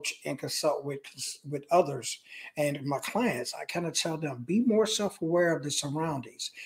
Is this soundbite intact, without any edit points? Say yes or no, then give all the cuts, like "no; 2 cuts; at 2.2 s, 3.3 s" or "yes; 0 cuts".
yes; 0 cuts